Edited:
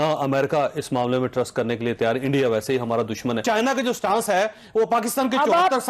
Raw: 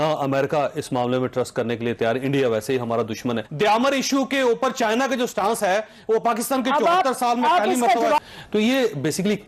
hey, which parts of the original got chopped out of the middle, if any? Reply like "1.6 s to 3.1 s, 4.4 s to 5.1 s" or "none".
3.4 s to 4.8 s

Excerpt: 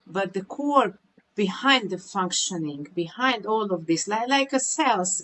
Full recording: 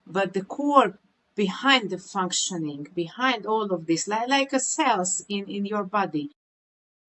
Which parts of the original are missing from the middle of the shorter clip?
none

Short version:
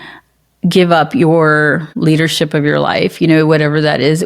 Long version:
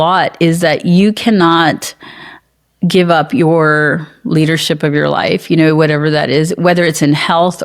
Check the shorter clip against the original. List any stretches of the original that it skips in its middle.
4.1 s to 4.2 s

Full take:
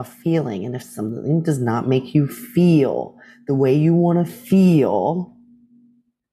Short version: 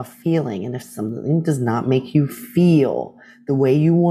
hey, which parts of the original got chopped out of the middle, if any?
none

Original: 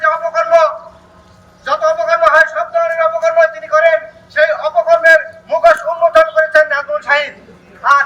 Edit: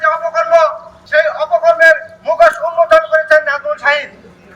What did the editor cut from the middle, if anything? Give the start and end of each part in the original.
0.9 s to 4.2 s

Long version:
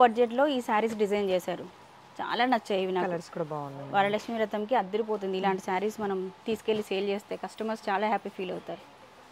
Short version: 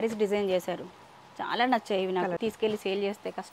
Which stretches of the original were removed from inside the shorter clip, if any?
3.2 s to 6.4 s

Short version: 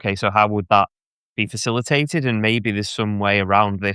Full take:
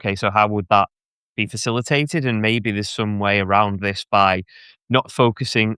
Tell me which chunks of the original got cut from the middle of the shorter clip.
none

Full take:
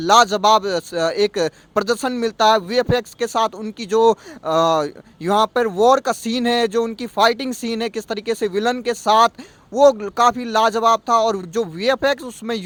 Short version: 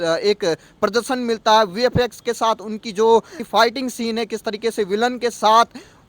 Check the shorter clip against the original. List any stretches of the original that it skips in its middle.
4.3 s to 7.0 s

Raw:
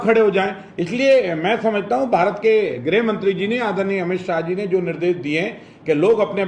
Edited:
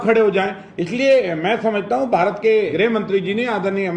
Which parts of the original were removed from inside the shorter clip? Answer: 2.7 s to 2.8 s

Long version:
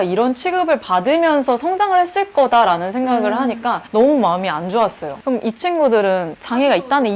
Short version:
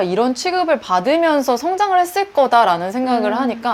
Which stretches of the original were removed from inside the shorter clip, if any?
none

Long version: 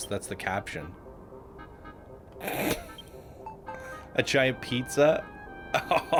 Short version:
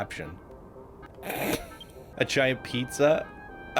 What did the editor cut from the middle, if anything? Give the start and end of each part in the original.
1.6 s to 2.2 s, 3.2 s to 4.0 s

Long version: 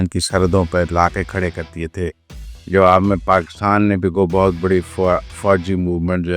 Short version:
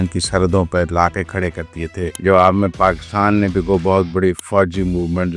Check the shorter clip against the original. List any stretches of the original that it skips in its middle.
2.1 s to 2.6 s, 4.9 s to 5.3 s

